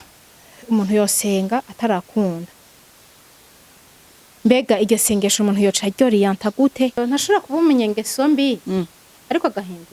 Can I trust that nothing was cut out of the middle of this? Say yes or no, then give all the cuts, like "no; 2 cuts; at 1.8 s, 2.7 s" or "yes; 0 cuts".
no; 1 cut; at 7.0 s